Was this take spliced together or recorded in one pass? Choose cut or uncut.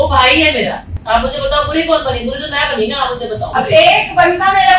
cut